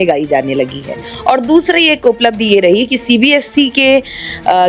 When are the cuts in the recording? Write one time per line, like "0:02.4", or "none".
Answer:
0:01.1